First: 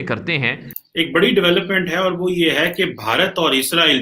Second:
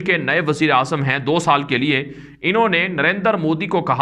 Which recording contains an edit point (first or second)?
first